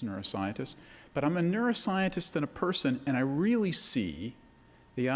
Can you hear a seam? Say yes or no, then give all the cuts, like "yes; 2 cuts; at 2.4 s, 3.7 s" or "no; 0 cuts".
yes; 1 cut; at 1.9 s